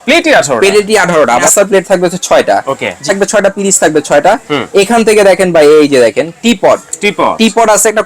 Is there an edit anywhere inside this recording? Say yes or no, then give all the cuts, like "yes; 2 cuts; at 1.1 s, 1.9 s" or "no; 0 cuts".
yes; 2 cuts; at 1.4 s, 3.0 s